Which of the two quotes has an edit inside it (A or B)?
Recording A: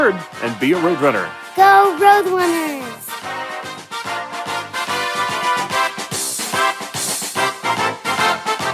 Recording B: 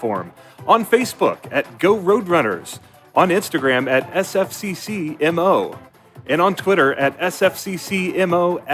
B